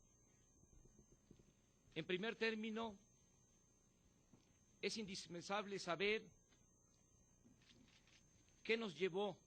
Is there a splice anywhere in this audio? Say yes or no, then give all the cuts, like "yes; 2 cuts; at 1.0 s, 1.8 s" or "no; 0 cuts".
yes; 1 cut; at 5.6 s